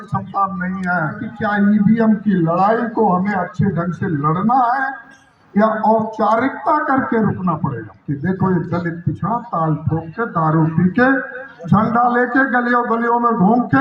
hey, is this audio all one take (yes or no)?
no